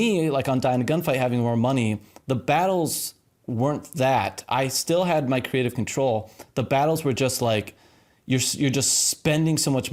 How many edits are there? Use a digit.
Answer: 0